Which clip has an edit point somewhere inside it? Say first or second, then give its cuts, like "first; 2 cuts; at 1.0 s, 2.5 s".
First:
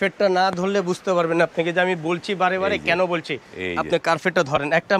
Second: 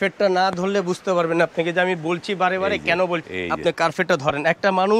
second; 1 cut; at 3.3 s